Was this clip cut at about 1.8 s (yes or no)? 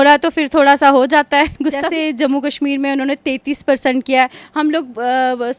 yes